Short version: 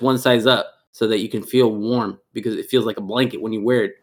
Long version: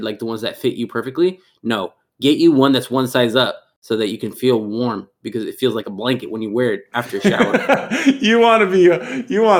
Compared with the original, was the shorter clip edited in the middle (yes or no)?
no